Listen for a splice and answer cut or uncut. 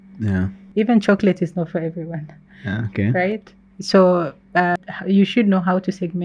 uncut